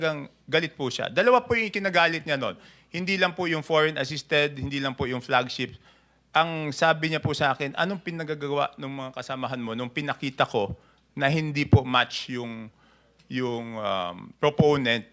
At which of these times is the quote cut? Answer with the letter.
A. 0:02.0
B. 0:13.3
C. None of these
C